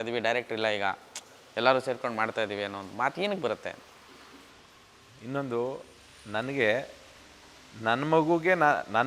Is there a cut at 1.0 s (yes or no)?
no